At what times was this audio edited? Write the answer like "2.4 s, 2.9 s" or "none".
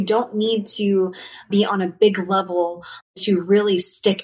1.5 s, 3.1 s